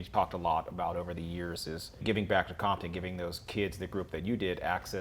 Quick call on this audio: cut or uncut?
cut